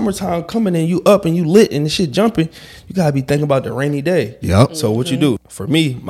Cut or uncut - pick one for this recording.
uncut